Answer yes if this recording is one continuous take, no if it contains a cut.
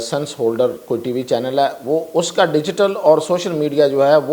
yes